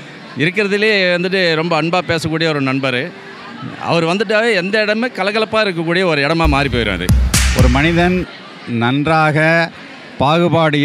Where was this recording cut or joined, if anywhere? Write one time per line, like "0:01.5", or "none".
0:07.4